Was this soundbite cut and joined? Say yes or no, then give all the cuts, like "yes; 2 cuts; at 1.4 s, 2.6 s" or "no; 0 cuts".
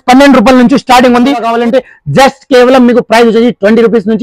yes; 1 cut; at 1.5 s